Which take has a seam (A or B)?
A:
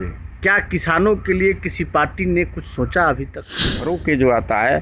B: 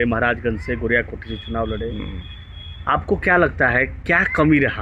A